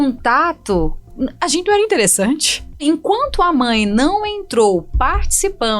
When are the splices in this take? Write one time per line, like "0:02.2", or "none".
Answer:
0:02.8